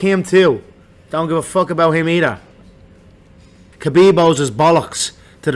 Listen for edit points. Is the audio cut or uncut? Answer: cut